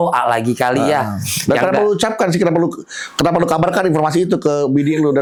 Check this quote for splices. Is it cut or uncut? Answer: uncut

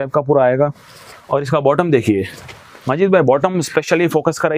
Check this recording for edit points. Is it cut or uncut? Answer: uncut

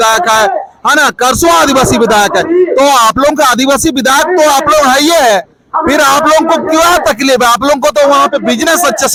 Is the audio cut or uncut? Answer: uncut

